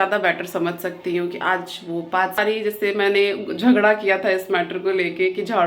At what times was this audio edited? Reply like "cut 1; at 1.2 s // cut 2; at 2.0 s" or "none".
cut 1; at 2.4 s

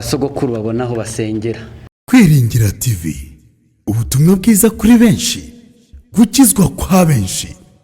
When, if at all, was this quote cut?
cut 1; at 1.8 s

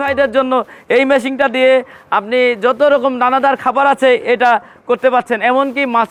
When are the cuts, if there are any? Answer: none

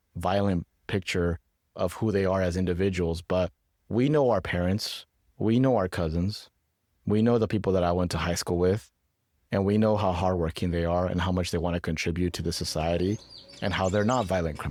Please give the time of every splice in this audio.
none

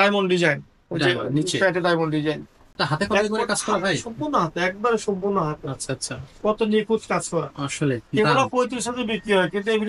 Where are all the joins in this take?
none

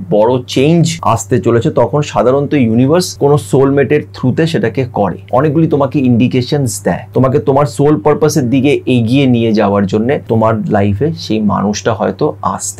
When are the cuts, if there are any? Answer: cut 1; at 0.9 s // cut 2; at 3.1 s // cut 3; at 5.2 s // cut 4; at 7.0 s // cut 5; at 10.2 s

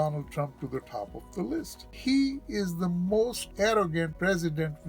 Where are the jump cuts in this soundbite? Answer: cut 1; at 1.8 s // cut 2; at 3.4 s // cut 3; at 4.1 s

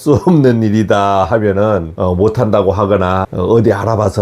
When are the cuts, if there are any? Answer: cut 1; at 1.9 s // cut 2; at 3.3 s

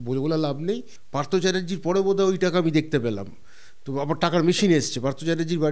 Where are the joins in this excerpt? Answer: cut 1; at 1.0 s

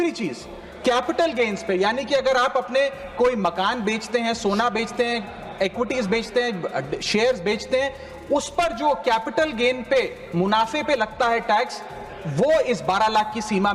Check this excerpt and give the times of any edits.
none

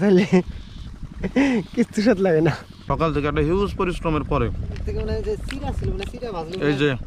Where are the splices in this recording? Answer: cut 1; at 2.9 s

